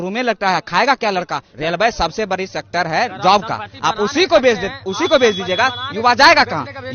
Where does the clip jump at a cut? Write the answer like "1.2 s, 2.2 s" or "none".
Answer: 1.4 s